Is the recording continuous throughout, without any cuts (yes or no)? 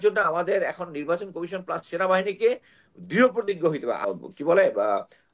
no